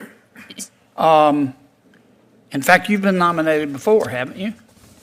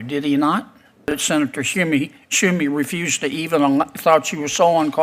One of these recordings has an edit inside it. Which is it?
second; 1 cut; at 1.1 s

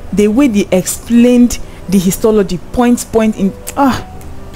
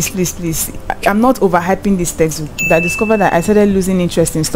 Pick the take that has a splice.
second; 1 cut; at 2.6 s

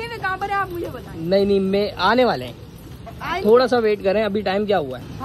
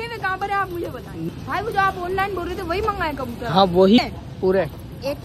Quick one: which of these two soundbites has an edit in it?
second; 2 cuts; at 1.2 s, 4.0 s

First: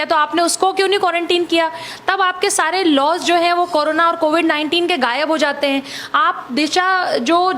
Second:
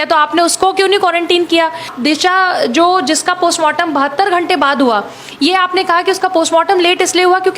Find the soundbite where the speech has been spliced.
second; 1 cut; at 1.9 s

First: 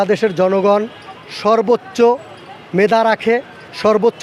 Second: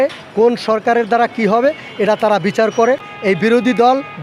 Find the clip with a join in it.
second; 1 cut; at 3.1 s

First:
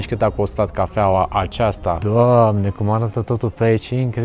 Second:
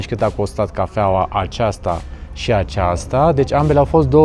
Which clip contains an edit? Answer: first; 1 cut; at 2.0 s

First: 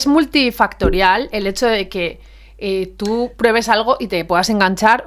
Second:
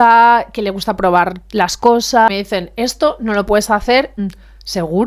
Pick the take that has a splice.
second; 2 cuts; at 2.3 s, 4.2 s

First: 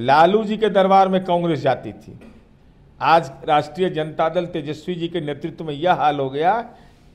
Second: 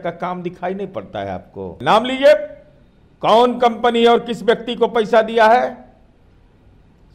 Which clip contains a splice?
second; 1 cut; at 1.7 s

